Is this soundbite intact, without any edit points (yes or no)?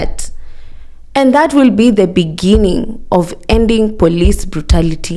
yes